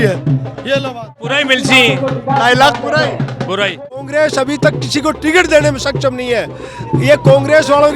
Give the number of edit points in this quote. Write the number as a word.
two